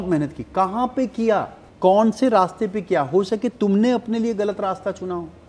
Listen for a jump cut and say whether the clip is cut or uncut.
cut